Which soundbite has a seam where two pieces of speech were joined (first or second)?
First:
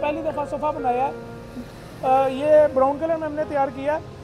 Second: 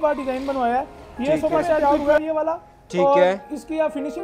second